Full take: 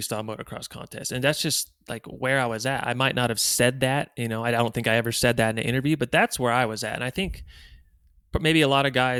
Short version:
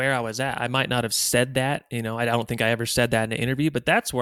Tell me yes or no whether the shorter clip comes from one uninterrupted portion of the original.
yes